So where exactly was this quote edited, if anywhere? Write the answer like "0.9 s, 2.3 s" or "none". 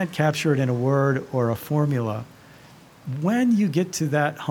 none